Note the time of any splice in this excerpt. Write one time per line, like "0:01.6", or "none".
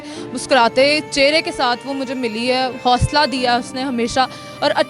none